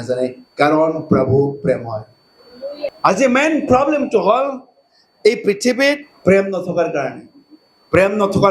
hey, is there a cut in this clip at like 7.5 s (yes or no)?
no